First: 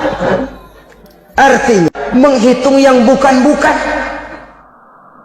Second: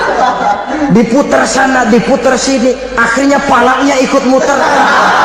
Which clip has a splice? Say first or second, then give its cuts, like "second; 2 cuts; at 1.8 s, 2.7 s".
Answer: first; 1 cut; at 1.9 s